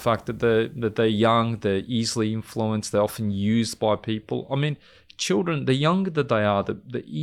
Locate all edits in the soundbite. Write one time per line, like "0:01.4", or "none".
none